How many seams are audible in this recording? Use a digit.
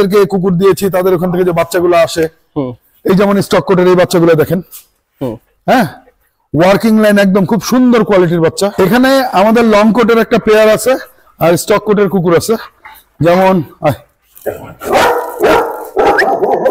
1